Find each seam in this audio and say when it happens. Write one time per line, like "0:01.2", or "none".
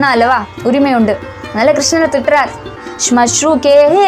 0:02.9